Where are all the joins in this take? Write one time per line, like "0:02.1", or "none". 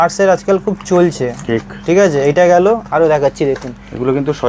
none